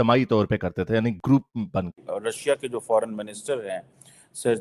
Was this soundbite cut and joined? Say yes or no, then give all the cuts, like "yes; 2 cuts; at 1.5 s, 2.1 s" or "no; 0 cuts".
yes; 1 cut; at 2.1 s